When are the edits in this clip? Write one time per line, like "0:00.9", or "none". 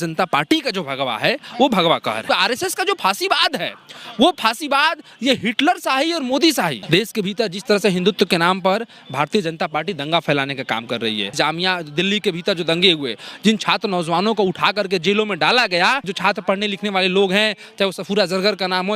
0:02.2
0:06.8
0:11.3
0:16.1